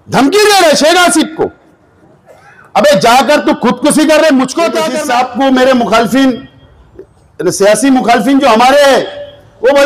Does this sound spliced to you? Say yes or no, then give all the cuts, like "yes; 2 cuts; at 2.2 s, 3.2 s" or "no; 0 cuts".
yes; 1 cut; at 4.9 s